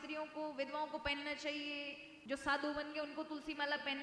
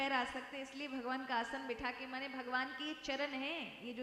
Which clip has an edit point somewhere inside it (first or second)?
first